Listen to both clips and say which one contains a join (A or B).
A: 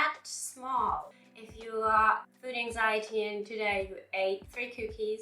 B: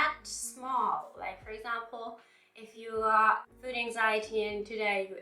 A